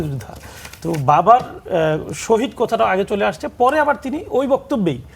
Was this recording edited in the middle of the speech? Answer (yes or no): no